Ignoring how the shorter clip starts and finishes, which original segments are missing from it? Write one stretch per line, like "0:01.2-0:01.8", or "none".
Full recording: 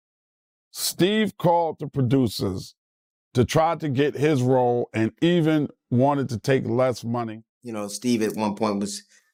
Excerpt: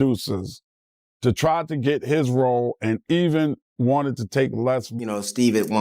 0:07.0-0:07.6